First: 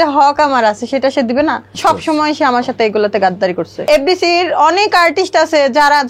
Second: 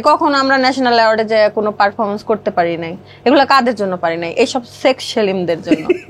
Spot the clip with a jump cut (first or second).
first